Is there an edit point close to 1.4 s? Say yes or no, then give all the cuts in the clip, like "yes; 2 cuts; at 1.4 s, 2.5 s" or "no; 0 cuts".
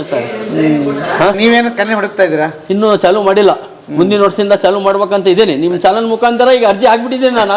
yes; 1 cut; at 1.4 s